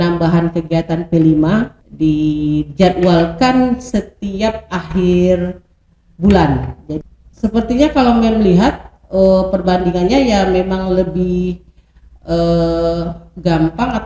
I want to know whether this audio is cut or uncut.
cut